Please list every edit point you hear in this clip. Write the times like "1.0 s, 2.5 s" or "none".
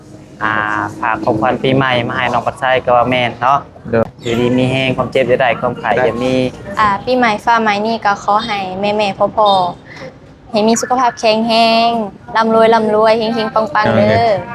4.0 s, 6.6 s